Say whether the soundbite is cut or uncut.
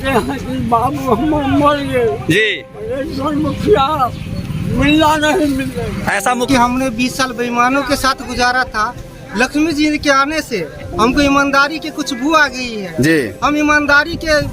cut